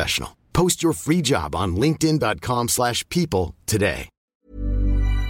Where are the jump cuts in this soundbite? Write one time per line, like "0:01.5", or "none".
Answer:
0:04.4